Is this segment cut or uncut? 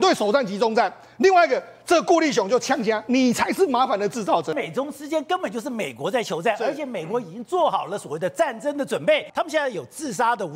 cut